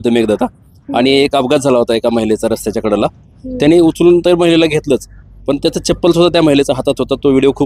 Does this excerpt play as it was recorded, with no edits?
yes; 0 cuts

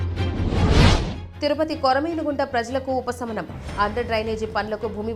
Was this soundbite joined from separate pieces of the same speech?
yes; 1 cut; at 1.2 s

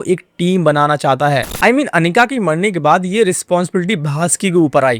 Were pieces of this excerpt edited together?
yes; 1 cut; at 1.5 s

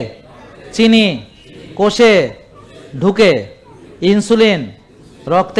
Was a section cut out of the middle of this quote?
no; 0 cuts

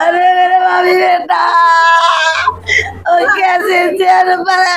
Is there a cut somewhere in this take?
no; 0 cuts

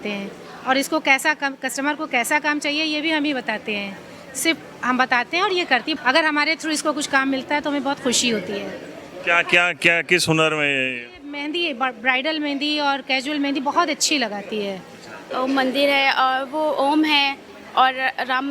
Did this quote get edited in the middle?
yes; 1 cut; at 15.2 s

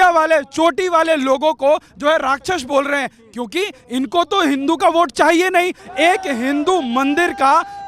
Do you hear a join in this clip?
yes; 1 cut; at 5.8 s

